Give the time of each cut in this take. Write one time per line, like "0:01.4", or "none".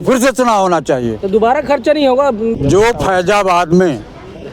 0:02.5